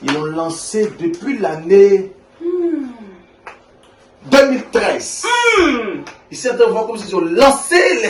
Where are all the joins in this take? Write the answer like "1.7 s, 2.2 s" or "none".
none